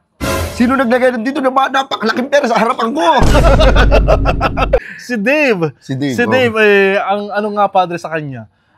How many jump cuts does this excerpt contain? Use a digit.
1